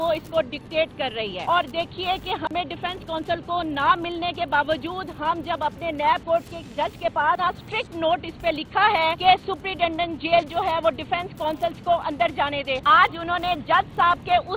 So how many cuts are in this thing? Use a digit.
4